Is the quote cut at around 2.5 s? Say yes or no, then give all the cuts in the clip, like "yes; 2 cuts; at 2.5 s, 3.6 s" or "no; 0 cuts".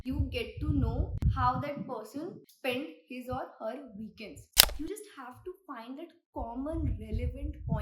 yes; 3 cuts; at 1.1 s, 2.5 s, 4.4 s